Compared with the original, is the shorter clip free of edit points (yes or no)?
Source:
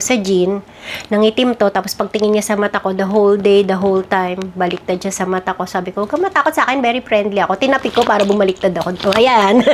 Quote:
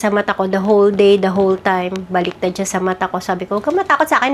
yes